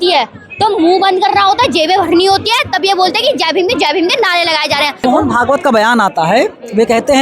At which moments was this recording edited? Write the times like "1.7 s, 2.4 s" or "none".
5.0 s